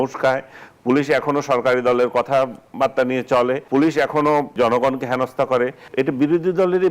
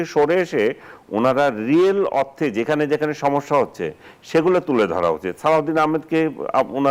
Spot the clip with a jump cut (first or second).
first